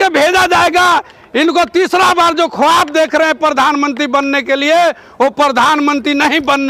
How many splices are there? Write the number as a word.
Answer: zero